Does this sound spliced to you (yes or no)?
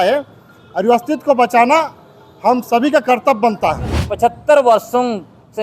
yes